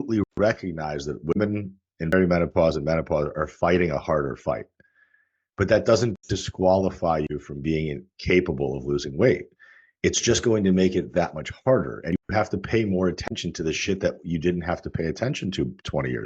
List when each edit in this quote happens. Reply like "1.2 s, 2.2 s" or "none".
none